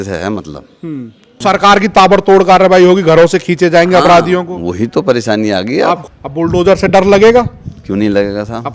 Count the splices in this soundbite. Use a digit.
2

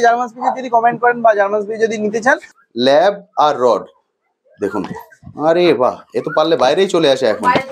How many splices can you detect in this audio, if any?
1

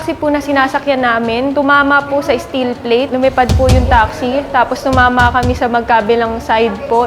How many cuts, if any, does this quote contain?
2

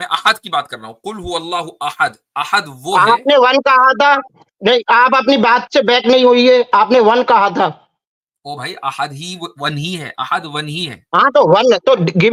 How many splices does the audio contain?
0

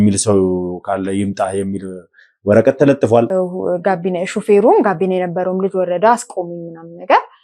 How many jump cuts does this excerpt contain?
1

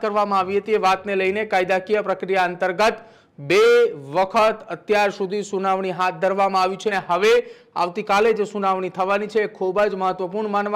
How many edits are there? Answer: 1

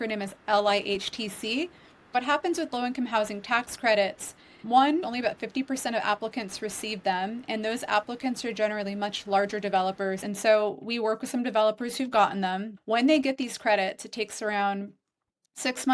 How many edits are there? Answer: 4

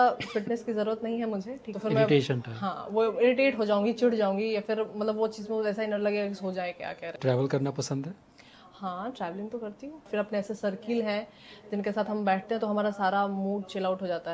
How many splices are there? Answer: 3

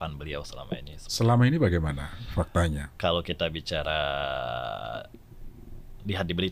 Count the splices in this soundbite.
0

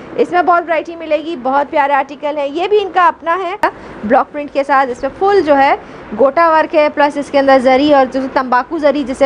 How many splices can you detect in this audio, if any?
1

